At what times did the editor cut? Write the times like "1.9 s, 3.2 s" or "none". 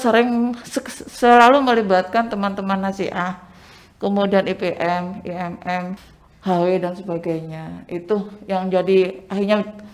6.0 s